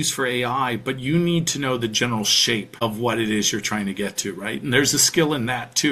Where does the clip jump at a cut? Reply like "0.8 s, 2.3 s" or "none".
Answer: 2.7 s